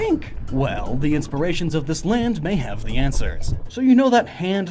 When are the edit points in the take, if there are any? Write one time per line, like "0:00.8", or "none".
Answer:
0:02.2